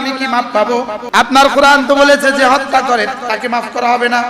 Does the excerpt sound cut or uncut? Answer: cut